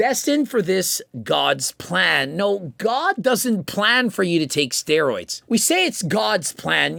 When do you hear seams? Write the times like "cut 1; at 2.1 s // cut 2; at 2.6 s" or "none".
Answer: none